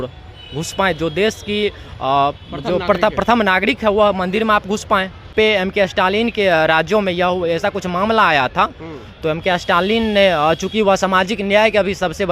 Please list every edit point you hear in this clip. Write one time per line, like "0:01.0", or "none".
0:05.3

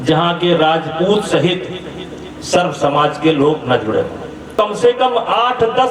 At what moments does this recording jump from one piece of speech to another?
0:04.5

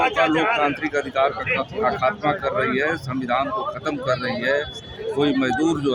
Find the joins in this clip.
none

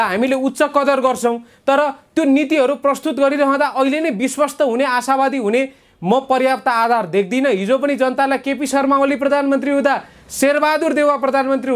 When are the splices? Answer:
none

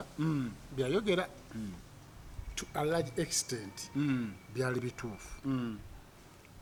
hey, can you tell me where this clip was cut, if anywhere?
none

